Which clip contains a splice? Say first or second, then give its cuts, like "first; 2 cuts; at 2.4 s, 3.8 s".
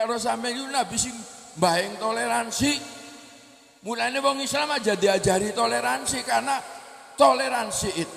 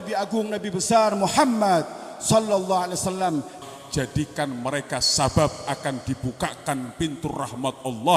second; 1 cut; at 3.5 s